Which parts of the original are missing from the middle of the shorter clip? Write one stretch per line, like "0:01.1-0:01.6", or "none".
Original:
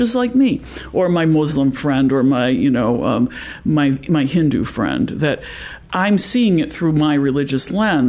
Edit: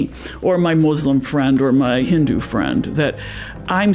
0:02.6-0:04.3